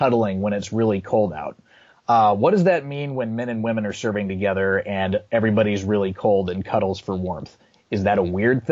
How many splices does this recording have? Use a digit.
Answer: 0